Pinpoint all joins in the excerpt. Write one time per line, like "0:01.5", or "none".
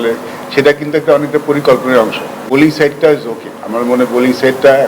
0:02.5